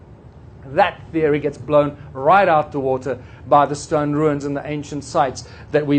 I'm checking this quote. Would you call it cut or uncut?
uncut